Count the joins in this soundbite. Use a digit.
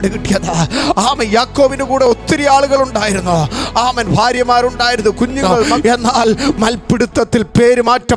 1